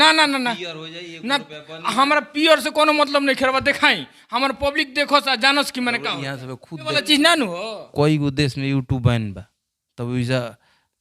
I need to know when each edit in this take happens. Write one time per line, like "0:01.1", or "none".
0:06.9